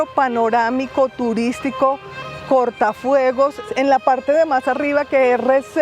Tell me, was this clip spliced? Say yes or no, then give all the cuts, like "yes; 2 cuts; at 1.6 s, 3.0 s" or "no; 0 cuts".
yes; 1 cut; at 3.6 s